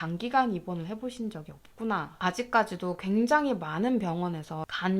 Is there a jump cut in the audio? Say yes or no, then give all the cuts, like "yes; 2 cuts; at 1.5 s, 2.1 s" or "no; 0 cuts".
yes; 1 cut; at 2.2 s